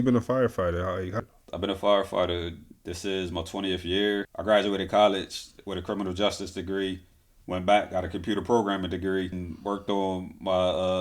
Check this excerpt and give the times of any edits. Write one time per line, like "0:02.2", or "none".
0:01.2
0:04.3
0:09.5